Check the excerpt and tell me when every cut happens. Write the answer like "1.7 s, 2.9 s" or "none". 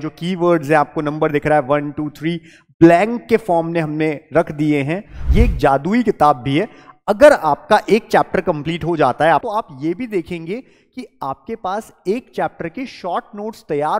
5.2 s, 9.4 s

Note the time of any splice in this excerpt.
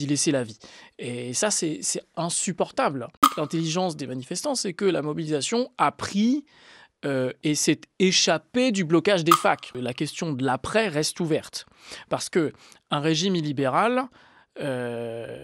3.2 s, 9.8 s

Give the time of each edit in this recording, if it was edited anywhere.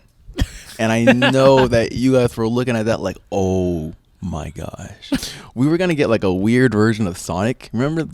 5.4 s

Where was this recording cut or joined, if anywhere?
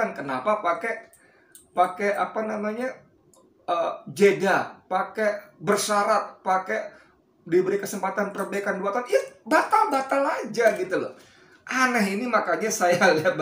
none

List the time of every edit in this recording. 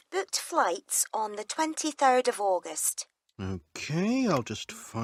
none

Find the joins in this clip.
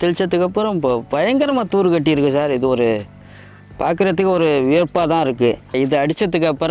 5.7 s

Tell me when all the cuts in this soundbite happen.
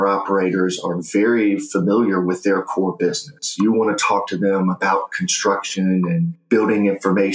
none

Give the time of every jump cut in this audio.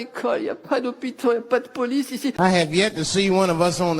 2.3 s

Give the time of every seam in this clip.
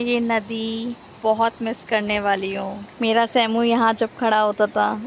2.8 s

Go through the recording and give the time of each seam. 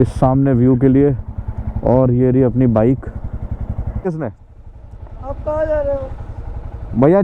4.1 s

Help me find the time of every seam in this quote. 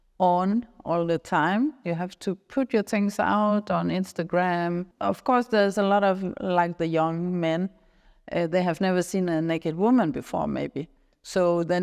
4.9 s

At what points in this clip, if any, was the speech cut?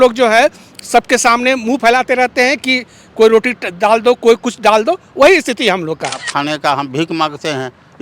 6.2 s

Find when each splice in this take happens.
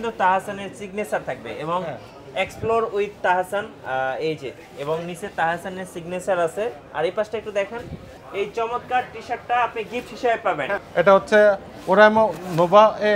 10.8 s

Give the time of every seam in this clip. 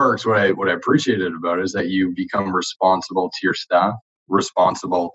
4.1 s

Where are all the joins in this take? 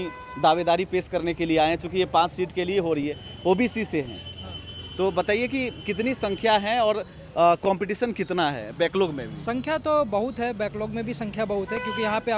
none

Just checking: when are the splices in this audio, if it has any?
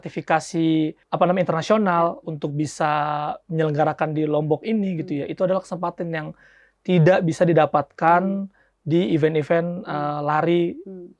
1.0 s

